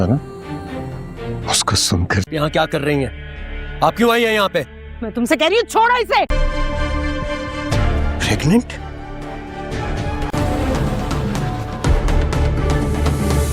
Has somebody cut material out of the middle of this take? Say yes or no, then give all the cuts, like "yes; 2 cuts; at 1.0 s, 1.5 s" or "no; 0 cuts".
yes; 1 cut; at 10.3 s